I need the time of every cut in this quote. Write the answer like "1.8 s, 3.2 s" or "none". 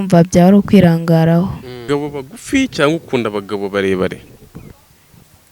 1.9 s